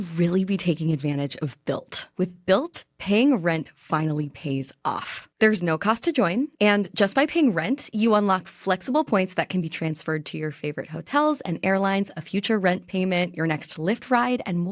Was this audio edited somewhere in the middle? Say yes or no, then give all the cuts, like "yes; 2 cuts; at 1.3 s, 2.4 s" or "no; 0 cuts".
yes; 1 cut; at 2.0 s